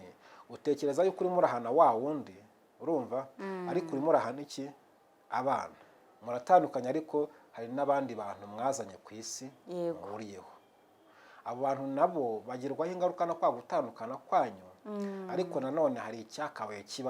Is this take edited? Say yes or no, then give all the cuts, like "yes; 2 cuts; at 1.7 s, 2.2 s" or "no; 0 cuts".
yes; 1 cut; at 5.8 s